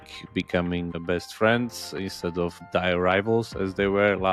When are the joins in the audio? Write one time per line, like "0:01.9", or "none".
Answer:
0:01.0
0:02.6